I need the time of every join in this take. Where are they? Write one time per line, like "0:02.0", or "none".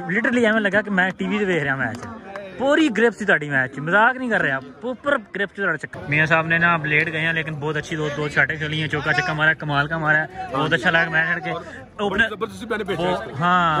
0:05.8